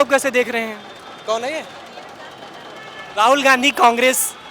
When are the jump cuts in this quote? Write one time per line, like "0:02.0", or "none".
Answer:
none